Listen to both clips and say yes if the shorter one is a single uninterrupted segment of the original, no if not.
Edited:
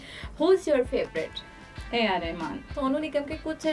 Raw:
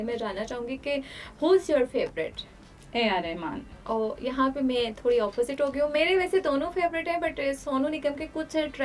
no